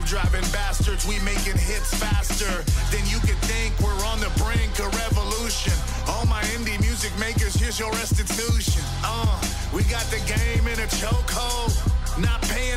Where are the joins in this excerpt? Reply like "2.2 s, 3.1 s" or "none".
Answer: none